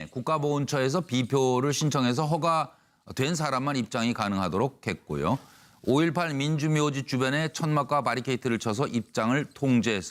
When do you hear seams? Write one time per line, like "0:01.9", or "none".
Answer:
none